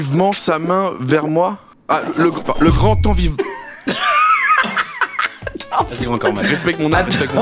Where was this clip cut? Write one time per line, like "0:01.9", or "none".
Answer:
0:06.4